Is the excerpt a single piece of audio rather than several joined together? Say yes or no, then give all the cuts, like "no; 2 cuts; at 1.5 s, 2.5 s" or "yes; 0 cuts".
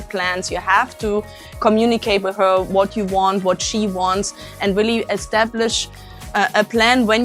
yes; 0 cuts